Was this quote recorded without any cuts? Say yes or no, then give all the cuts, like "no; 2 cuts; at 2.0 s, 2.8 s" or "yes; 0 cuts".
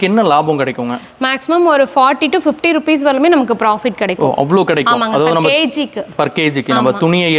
yes; 0 cuts